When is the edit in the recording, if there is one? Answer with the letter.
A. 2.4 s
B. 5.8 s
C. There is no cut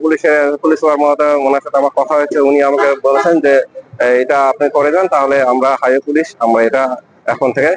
C